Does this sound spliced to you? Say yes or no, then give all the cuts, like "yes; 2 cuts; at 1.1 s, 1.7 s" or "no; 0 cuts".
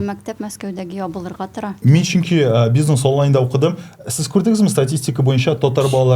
no; 0 cuts